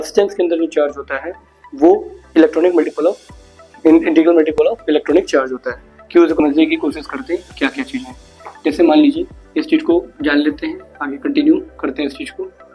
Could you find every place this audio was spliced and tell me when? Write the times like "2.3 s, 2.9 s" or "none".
6.4 s